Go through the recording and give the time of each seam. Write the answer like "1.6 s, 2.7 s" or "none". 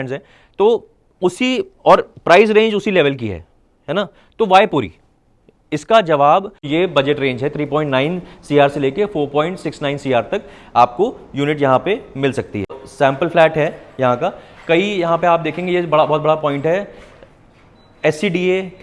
6.7 s, 12.8 s